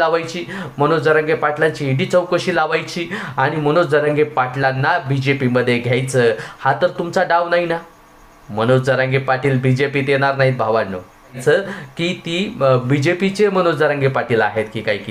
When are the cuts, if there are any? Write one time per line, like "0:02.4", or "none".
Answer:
0:11.4